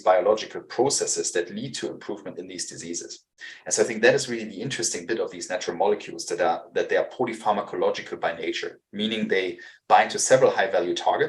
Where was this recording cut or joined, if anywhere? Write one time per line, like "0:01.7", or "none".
none